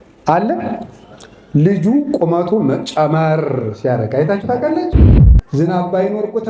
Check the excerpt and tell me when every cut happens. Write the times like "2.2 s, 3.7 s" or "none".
5.1 s

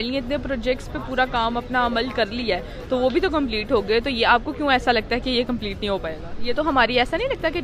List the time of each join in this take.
none

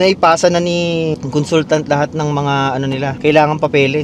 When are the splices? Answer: 3.1 s

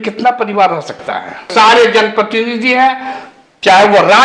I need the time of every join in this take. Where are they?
1.4 s

